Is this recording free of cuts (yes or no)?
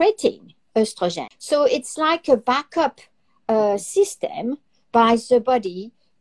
no